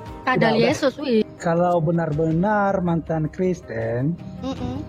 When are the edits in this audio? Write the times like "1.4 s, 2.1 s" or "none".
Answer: 1.3 s